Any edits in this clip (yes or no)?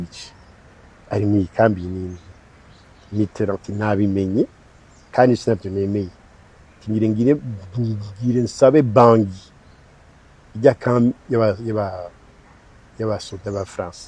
no